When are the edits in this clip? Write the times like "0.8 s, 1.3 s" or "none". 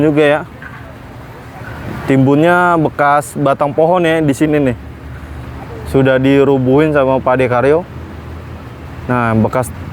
none